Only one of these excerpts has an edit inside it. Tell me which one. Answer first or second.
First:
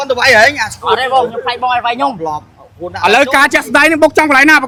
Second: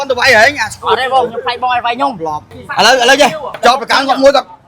second